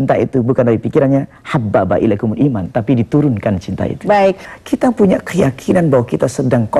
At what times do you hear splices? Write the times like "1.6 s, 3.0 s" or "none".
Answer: 4.5 s

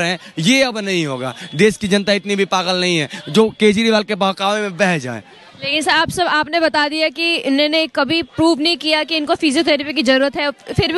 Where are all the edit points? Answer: none

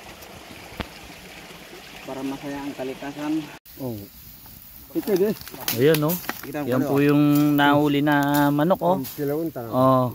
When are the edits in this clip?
3.5 s

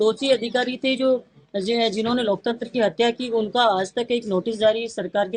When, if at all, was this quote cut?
none

